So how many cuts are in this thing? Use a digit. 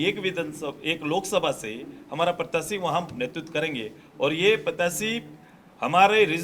0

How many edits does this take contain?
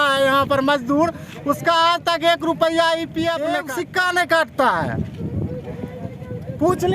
1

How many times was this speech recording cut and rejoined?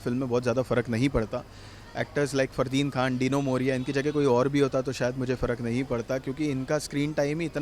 0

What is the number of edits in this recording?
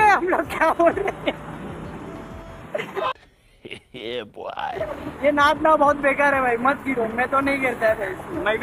0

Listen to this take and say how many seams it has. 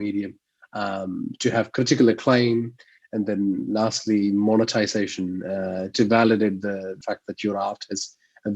1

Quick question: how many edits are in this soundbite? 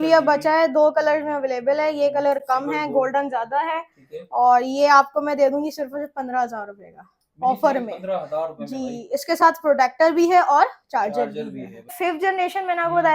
1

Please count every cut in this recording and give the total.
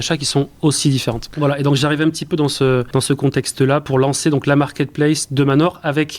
2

